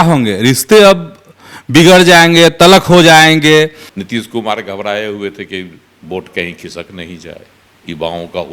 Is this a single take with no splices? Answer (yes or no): no